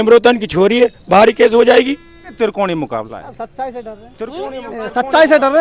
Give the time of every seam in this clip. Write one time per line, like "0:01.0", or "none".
0:02.3

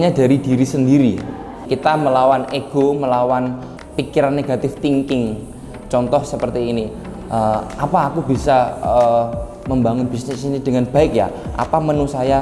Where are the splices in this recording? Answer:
0:01.6
0:03.7

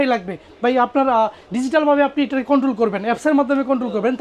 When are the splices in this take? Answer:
none

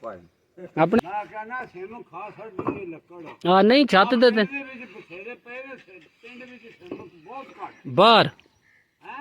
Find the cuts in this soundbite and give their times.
0:01.0

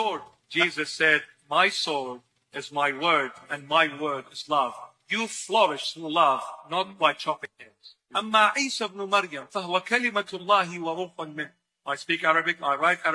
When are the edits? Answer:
0:02.5

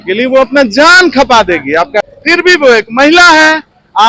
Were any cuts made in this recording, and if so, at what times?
0:02.0

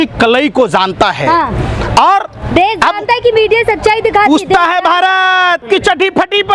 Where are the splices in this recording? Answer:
0:05.6

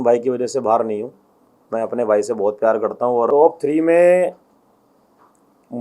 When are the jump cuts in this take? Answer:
0:03.3

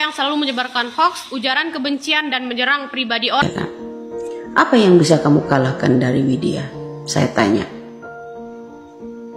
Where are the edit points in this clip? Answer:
0:03.4

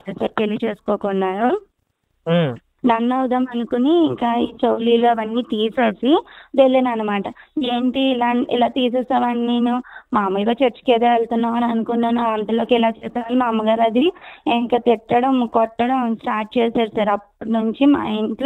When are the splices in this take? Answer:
none

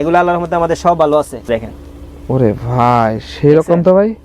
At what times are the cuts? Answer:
0:01.5

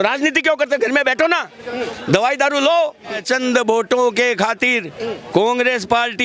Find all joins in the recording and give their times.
0:03.1

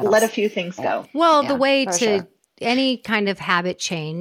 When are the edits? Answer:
0:01.1

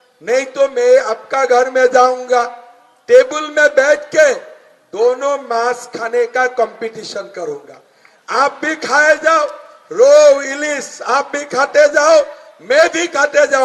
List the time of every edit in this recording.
none

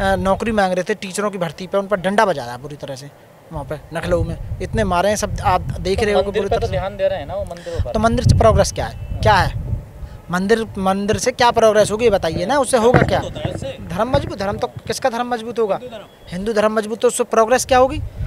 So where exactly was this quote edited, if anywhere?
none

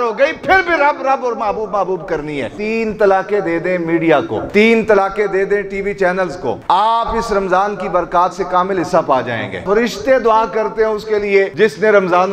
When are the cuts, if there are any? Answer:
0:02.5
0:04.4
0:06.6
0:09.6
0:11.5

